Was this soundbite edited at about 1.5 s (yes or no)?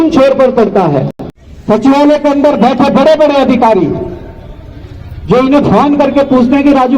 yes